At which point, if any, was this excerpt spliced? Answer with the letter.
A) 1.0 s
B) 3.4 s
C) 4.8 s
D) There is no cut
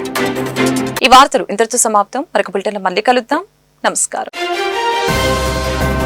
D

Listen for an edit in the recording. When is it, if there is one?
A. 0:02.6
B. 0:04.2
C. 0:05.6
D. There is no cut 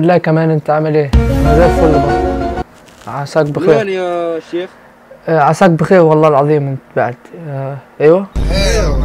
A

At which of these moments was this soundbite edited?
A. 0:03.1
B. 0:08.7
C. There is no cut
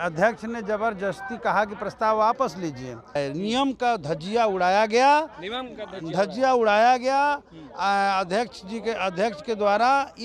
A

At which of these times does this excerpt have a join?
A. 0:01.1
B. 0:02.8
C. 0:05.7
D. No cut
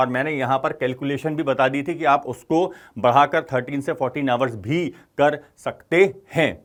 D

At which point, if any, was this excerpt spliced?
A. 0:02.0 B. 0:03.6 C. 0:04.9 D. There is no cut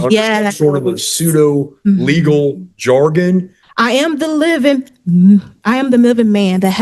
B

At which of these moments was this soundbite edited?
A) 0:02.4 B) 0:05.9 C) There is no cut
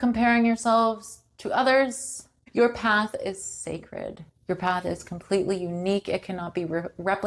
A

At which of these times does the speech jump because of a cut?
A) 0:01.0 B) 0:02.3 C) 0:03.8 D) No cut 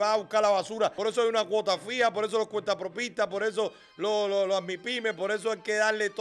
A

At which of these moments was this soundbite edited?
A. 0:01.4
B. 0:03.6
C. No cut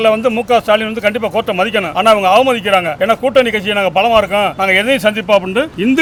C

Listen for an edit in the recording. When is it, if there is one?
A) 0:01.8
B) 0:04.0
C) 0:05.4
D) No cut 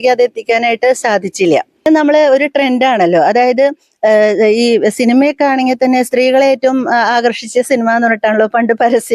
A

